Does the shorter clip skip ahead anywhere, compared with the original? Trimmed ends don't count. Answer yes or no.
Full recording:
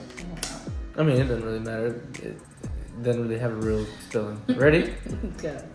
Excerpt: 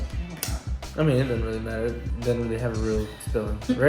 yes